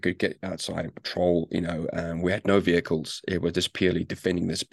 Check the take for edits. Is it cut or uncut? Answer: uncut